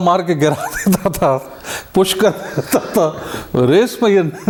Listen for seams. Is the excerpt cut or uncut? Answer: uncut